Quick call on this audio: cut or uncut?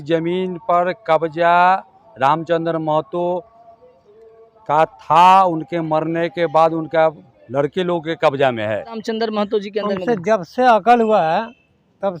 cut